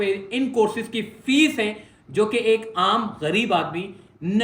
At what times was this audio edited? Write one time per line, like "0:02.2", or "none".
none